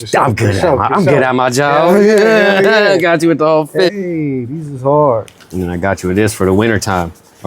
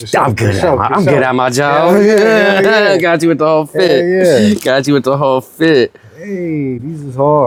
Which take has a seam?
first; 2 cuts; at 3.9 s, 5.5 s

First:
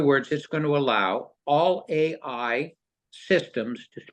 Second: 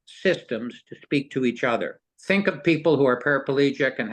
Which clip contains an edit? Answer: second; 1 cut; at 2.1 s

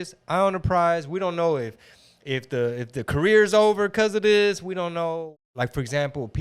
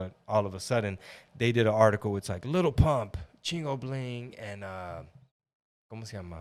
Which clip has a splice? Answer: first; 1 cut; at 5.1 s

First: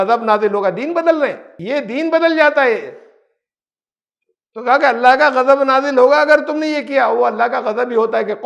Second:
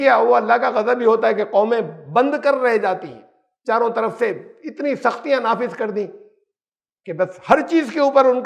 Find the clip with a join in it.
first; 1 cut; at 1.6 s

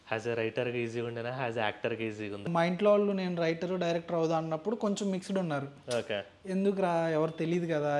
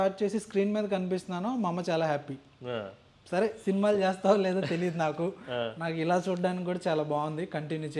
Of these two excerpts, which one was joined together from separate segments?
first; 1 cut; at 2.5 s

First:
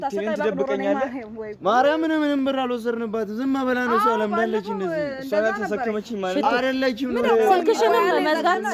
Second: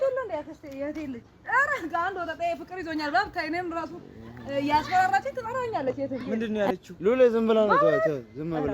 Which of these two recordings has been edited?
second; 1 cut; at 6.2 s

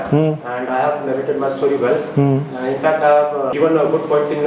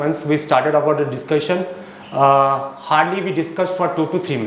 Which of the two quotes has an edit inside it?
first; 1 cut; at 3.5 s

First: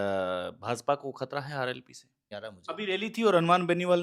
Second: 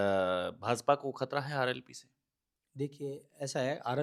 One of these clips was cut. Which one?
first; 1 cut; at 2.3 s

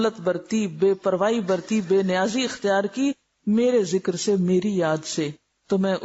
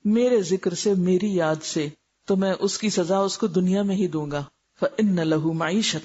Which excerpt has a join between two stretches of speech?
second; 1 cut; at 4.6 s

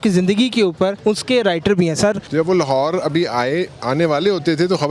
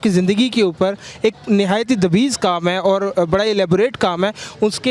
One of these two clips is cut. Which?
first; 2 cuts; at 1.0 s, 2.2 s

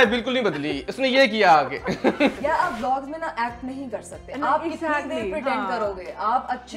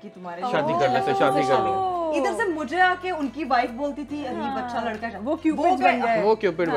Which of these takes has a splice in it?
first; 1 cut; at 2.4 s

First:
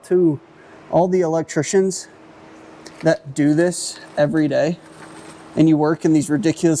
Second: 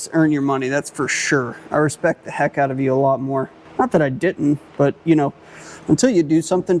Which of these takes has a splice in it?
second; 1 cut; at 3.6 s

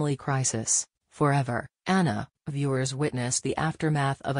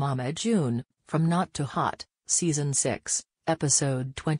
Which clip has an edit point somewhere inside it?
second; 1 cut; at 1.2 s

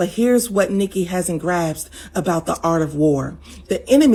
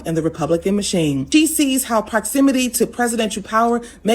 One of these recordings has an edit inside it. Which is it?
second; 1 cut; at 1.2 s

